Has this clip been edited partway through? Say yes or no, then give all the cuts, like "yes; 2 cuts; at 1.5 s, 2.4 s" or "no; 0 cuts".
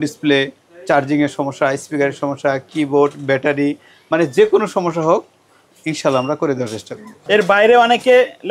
no; 0 cuts